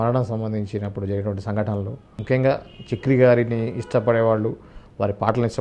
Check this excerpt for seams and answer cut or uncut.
cut